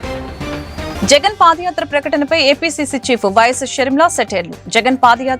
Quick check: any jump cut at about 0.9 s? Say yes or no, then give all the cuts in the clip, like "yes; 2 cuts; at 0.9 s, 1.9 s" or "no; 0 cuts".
yes; 1 cut; at 0.9 s